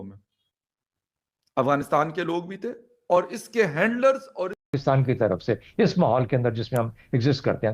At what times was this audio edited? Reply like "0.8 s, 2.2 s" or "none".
4.6 s